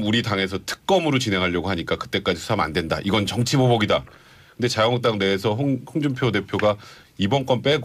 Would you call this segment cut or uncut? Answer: uncut